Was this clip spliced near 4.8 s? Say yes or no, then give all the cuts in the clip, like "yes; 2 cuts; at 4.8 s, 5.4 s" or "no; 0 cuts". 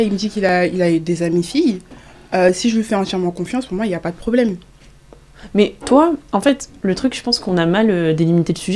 no; 0 cuts